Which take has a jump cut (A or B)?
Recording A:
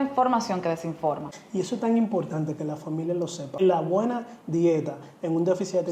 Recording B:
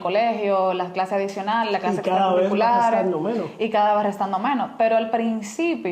A